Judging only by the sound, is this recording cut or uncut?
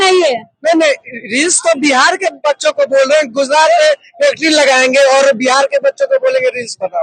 uncut